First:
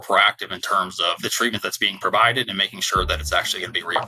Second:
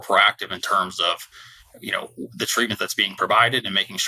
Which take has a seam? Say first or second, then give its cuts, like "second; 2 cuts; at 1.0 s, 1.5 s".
first; 1 cut; at 1.2 s